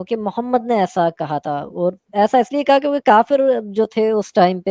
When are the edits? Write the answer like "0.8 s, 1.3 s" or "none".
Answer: none